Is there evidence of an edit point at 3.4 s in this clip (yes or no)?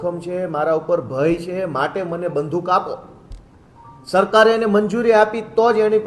no